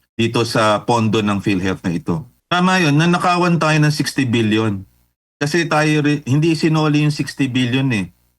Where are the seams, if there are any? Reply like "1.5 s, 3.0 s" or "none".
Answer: 2.3 s

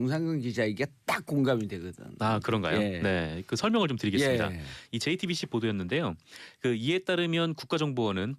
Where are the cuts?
4.6 s

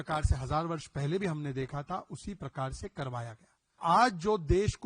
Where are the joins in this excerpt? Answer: 3.8 s

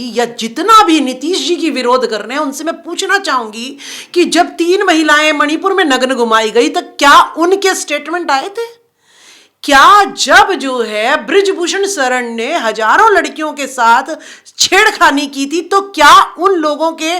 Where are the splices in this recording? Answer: none

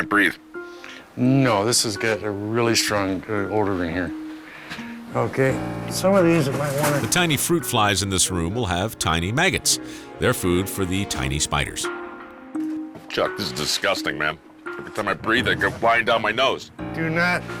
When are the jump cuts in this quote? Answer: none

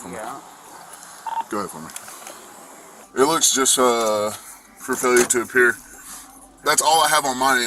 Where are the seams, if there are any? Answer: 3.0 s

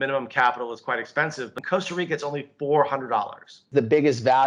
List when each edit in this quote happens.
1.6 s, 3.7 s

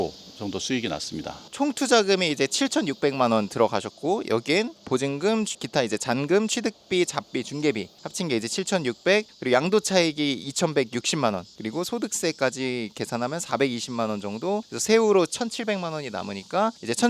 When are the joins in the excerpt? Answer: none

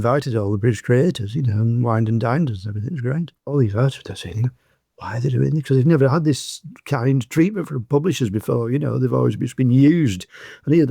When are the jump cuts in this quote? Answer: 3.4 s

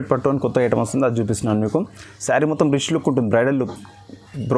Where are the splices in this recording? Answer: none

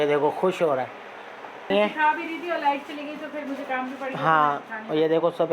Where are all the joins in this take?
1.7 s

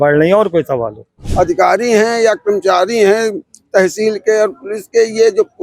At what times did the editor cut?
1.2 s

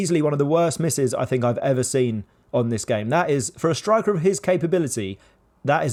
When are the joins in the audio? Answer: none

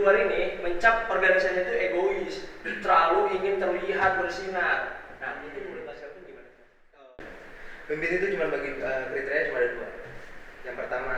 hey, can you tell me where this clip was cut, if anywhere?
7.0 s

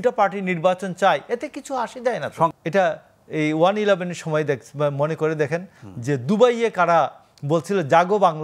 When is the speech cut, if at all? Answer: 2.5 s

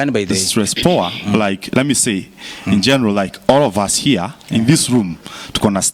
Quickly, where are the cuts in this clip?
none

